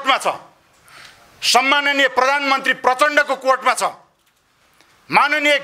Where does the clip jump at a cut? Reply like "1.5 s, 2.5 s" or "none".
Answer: none

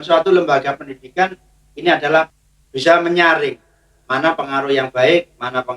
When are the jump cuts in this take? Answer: 2.3 s

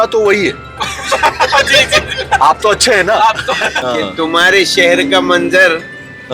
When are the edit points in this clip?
3.7 s

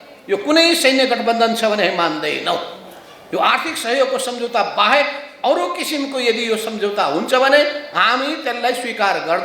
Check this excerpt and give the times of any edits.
none

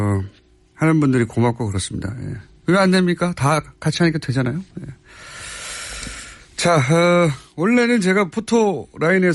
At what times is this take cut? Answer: none

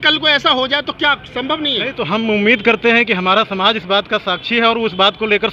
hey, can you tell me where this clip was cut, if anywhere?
none

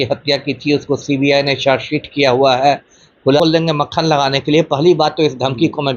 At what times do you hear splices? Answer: 3.4 s

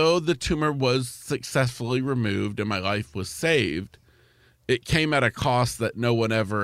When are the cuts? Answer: none

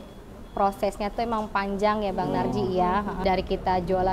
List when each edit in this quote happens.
3.2 s

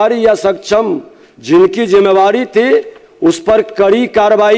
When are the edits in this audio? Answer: none

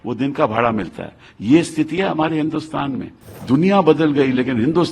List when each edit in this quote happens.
3.3 s

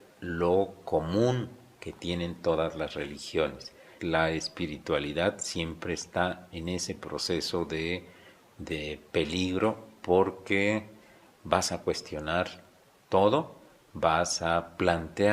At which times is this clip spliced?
3.9 s

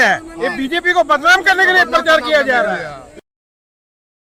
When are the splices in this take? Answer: none

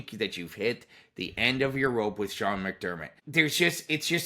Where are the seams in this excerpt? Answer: 3.1 s

